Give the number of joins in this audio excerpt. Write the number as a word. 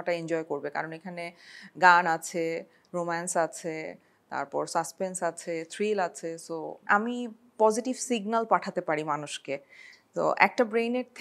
one